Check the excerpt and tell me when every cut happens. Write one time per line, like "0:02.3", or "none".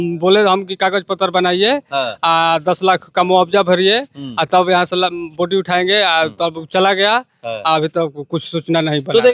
none